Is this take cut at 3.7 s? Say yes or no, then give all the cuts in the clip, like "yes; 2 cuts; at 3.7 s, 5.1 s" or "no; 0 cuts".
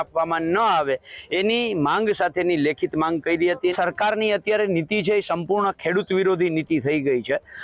yes; 1 cut; at 3.7 s